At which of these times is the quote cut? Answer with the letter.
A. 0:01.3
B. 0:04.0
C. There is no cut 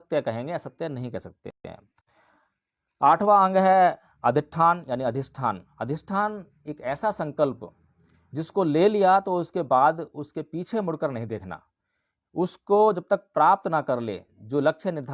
C